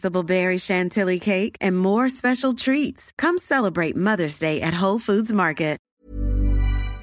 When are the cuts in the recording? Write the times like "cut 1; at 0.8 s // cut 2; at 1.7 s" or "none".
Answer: cut 1; at 6.0 s